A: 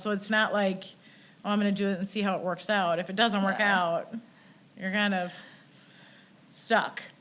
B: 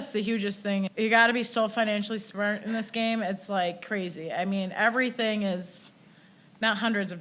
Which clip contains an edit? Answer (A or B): B